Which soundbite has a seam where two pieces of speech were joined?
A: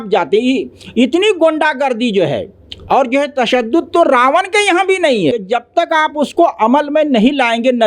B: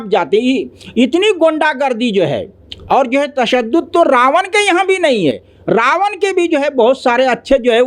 A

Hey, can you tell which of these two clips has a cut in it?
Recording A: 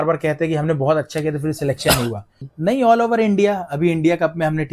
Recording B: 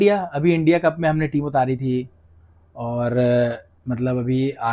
A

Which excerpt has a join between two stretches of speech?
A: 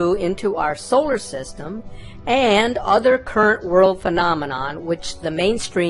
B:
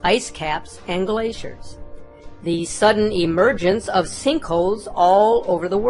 A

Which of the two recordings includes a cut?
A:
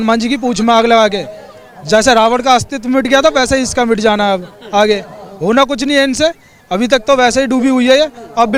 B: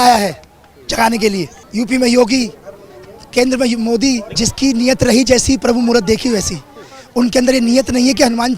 B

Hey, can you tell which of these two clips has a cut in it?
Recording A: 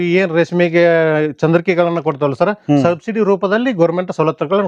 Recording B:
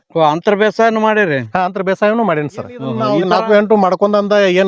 B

